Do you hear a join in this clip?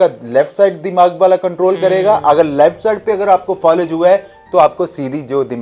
no; 0 cuts

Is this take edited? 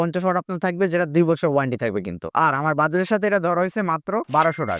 no; 0 cuts

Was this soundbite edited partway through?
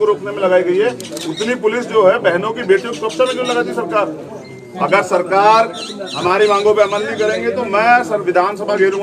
yes; 1 cut; at 4.6 s

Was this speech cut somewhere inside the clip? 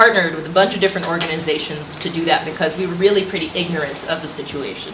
yes; 1 cut; at 2.9 s

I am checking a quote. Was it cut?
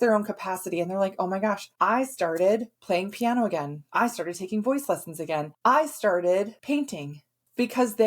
yes; 5 cuts; at 1.7 s, 2.7 s, 3.8 s, 5.5 s, 7.0 s

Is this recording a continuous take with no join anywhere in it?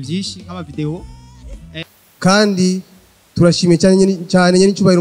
no; 1 cut; at 1.8 s

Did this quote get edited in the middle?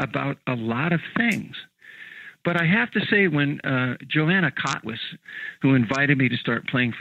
yes; 1 cut; at 5.2 s

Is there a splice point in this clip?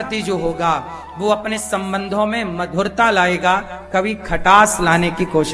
no; 0 cuts

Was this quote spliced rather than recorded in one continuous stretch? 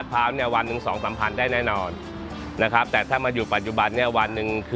no; 0 cuts

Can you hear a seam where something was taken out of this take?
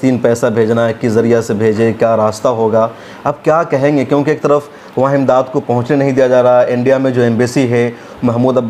no; 0 cuts

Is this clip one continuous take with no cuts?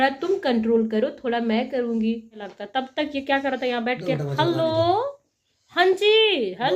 no; 1 cut; at 2.5 s

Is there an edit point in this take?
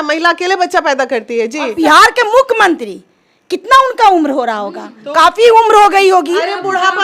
yes; 1 cut; at 1.7 s

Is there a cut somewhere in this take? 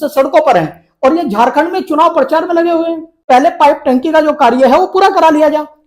yes; 1 cut; at 3.2 s

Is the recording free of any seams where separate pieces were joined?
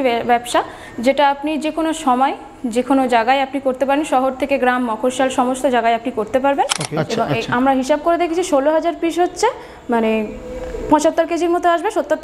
no; 1 cut; at 6.8 s

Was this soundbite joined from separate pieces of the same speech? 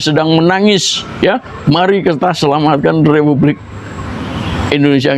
no; 0 cuts

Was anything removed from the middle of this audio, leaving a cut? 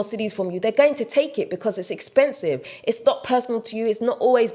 yes; 1 cut; at 2.7 s

